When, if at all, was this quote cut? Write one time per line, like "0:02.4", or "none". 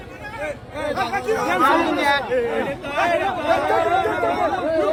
none